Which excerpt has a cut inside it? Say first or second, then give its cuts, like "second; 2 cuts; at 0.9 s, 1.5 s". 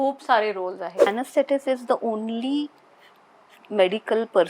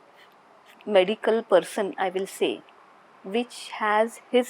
first; 1 cut; at 1.1 s